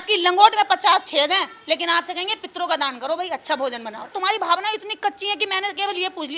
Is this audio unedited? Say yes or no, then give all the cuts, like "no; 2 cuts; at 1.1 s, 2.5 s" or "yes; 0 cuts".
no; 1 cut; at 4.1 s